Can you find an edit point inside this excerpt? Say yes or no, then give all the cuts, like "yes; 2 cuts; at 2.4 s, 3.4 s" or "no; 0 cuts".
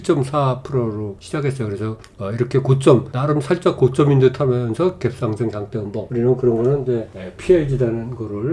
no; 0 cuts